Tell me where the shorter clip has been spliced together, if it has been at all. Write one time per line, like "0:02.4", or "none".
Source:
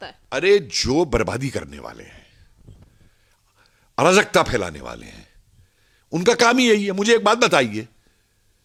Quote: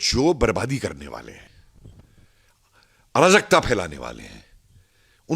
0:01.4